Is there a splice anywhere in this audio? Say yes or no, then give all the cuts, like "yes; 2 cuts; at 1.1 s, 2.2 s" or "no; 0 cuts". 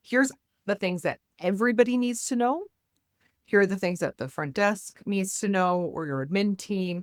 no; 0 cuts